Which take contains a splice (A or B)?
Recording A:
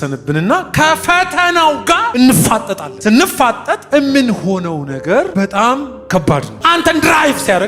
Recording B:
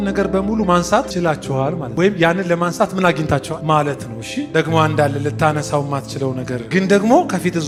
A